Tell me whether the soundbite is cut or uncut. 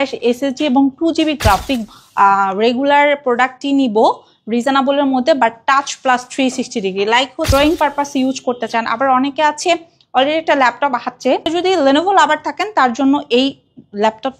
cut